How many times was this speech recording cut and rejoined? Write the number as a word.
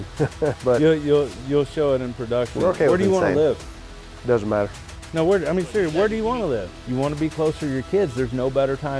one